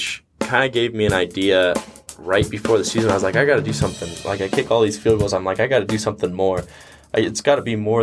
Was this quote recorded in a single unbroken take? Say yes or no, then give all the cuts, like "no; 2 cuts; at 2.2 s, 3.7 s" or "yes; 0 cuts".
yes; 0 cuts